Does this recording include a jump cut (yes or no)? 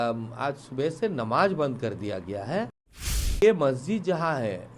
yes